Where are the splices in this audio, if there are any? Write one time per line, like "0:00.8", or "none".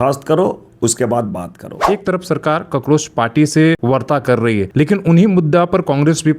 0:01.8
0:03.8
0:04.7